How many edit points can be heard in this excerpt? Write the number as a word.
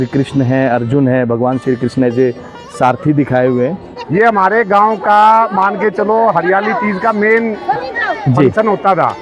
one